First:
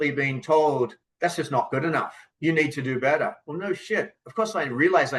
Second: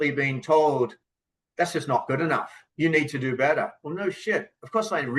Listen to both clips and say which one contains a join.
first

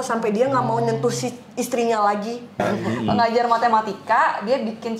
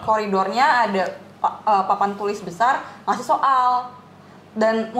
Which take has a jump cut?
first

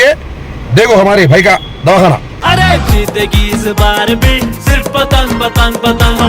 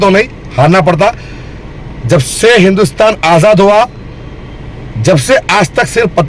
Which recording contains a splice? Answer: first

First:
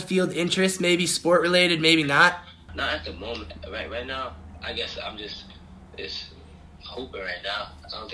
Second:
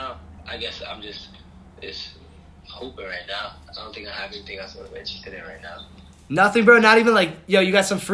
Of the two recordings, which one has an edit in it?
first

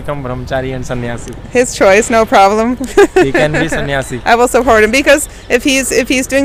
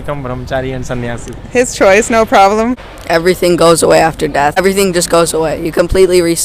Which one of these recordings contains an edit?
second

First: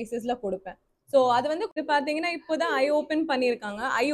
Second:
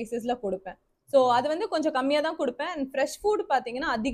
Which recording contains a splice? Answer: first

